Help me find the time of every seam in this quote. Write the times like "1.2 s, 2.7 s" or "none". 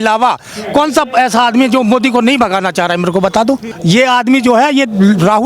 3.7 s